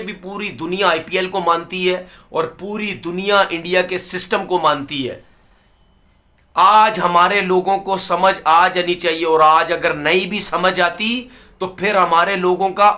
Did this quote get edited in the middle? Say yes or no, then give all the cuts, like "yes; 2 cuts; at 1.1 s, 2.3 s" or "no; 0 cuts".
no; 0 cuts